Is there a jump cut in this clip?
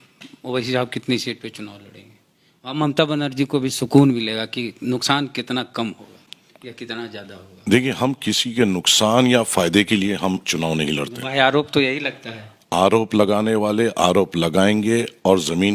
no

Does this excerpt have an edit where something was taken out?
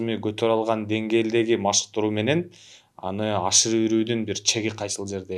no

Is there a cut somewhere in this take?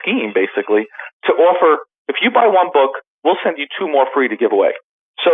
no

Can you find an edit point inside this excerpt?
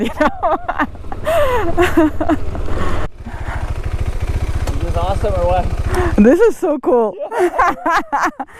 yes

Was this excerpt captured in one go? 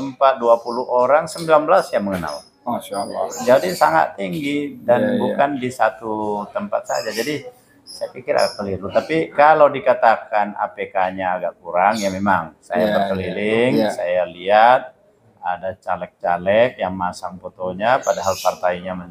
yes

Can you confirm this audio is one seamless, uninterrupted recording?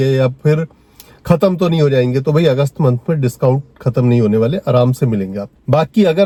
yes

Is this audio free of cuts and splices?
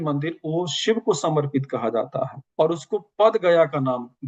yes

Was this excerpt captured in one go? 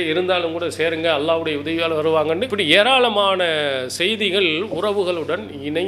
no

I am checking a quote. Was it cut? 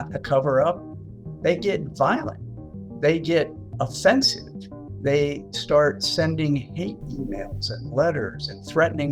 yes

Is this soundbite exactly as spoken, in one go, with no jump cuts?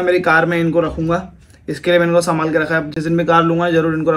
yes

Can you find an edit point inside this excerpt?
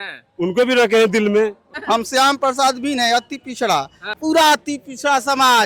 yes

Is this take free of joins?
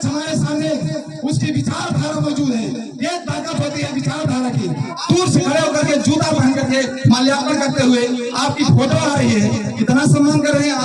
no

